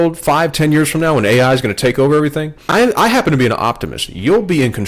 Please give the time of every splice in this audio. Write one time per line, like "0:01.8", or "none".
0:02.6

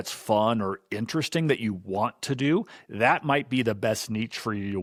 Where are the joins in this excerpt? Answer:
none

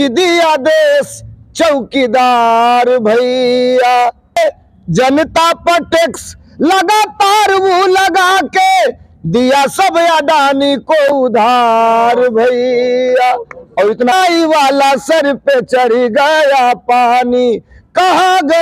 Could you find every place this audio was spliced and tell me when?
0:04.4
0:14.1

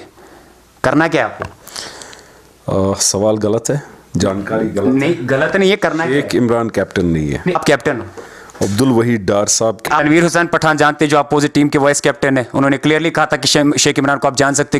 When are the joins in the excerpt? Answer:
0:07.5
0:09.8

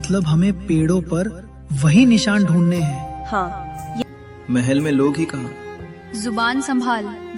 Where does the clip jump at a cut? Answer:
0:04.0

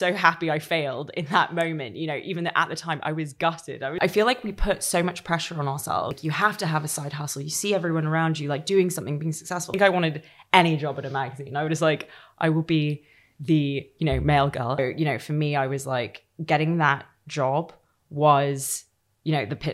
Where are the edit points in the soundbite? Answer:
0:04.0
0:06.2
0:09.7
0:14.8

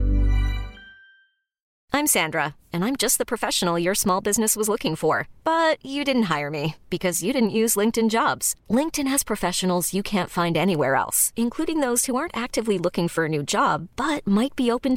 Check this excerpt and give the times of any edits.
0:01.7

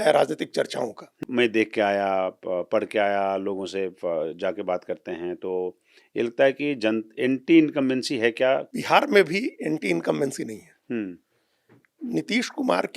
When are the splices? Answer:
0:01.2
0:08.7

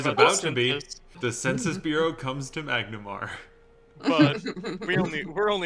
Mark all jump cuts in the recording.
0:01.1

